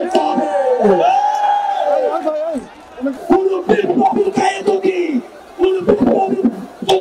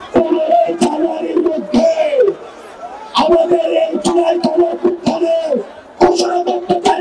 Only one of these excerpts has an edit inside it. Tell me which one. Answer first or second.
first